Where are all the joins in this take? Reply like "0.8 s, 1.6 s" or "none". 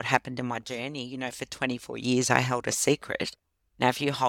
none